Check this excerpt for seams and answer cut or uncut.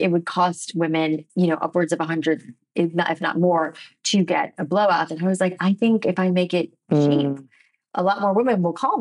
uncut